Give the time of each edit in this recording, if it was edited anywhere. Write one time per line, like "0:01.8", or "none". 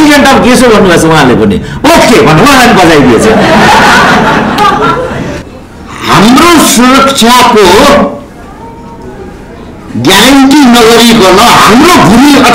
0:05.4